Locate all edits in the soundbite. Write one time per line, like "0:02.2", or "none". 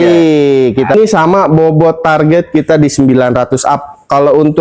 0:00.9